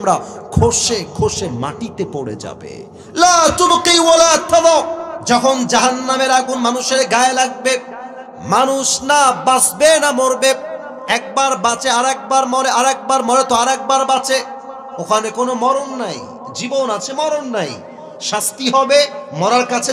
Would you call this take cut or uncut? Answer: cut